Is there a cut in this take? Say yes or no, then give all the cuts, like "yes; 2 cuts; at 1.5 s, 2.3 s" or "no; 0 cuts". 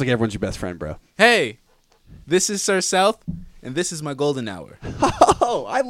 no; 0 cuts